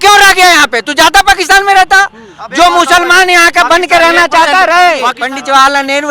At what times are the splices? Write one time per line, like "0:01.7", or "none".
0:05.2